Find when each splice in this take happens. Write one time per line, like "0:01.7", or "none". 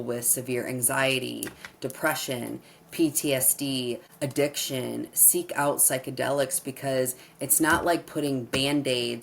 0:04.1